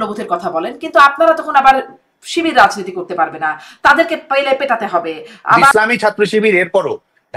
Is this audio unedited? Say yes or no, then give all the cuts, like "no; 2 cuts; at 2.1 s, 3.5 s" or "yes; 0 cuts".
no; 1 cut; at 5.7 s